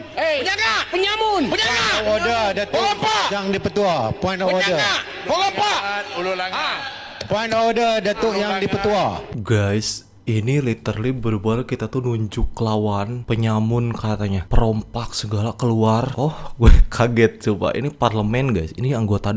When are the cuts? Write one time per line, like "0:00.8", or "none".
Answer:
none